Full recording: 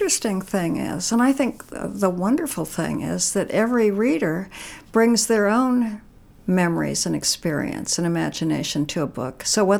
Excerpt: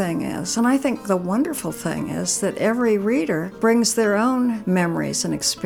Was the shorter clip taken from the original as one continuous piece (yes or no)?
no